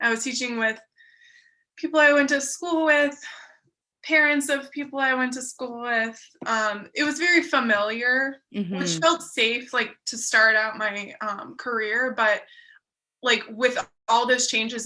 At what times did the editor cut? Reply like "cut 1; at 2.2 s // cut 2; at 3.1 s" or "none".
none